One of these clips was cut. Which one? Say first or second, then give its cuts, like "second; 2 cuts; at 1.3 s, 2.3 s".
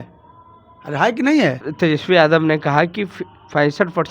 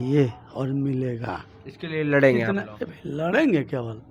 first; 1 cut; at 1.7 s